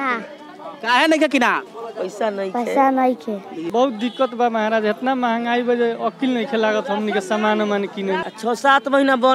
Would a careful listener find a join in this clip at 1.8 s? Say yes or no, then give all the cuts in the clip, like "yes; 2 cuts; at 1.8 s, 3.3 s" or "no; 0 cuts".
no; 2 cuts; at 3.5 s, 8.2 s